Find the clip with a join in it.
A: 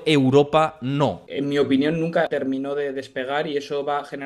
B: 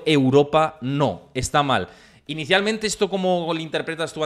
A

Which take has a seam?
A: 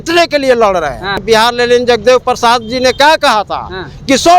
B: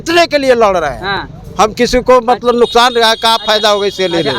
A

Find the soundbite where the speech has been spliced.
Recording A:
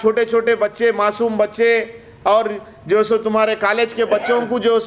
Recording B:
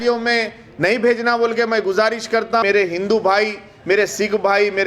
B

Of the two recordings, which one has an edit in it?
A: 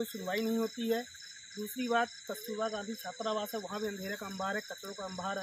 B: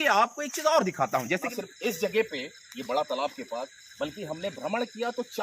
B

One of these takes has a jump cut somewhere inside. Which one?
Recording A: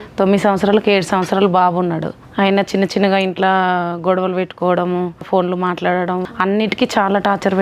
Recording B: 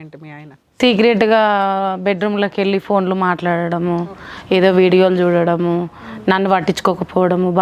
A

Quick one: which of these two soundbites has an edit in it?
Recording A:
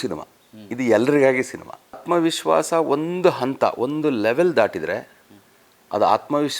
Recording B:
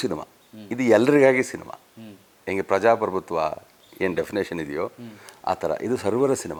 A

